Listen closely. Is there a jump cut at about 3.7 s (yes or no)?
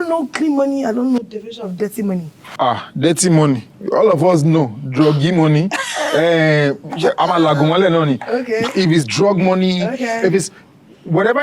no